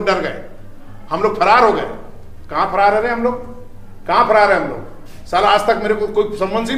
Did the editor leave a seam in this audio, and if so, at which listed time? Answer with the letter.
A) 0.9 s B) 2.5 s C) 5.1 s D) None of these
D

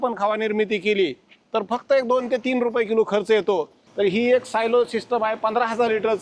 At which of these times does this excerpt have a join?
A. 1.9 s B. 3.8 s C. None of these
B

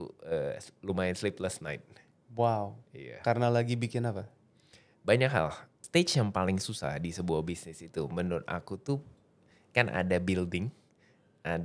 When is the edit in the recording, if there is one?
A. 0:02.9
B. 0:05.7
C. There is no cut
B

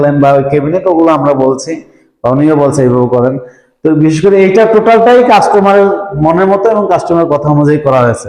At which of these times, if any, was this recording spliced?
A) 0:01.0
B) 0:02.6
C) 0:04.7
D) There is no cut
D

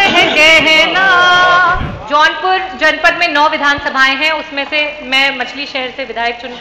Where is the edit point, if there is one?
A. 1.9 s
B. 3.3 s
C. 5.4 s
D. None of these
A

